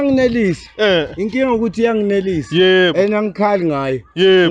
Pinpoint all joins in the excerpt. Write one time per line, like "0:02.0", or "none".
none